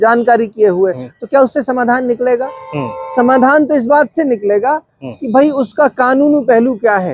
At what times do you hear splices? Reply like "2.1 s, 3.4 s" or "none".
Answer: none